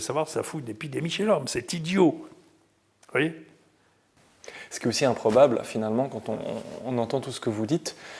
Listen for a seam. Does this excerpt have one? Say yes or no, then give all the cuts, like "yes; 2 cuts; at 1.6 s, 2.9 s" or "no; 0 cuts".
no; 0 cuts